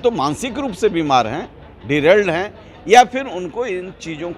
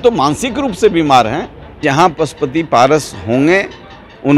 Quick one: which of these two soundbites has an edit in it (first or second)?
second